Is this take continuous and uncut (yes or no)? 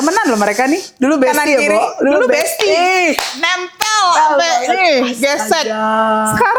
yes